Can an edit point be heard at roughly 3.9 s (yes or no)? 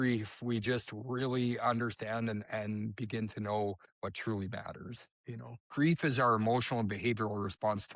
yes